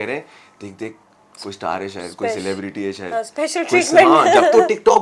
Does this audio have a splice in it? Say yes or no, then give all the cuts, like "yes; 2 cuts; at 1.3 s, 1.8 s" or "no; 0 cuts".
no; 0 cuts